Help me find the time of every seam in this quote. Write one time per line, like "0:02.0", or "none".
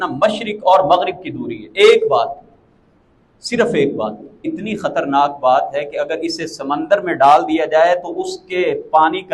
0:04.4

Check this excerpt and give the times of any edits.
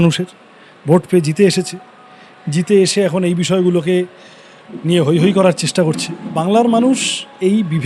0:06.4

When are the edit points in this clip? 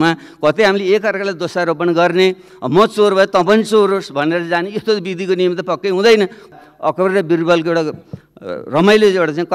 0:06.5

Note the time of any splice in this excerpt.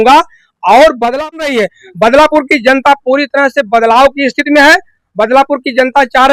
0:01.5

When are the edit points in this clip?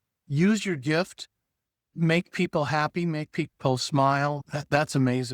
0:04.4

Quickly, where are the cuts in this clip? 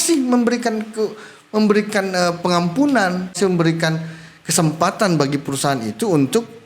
0:03.4

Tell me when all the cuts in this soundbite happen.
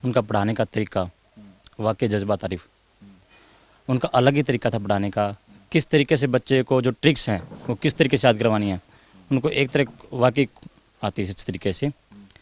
none

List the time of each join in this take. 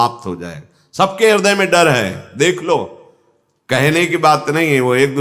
none

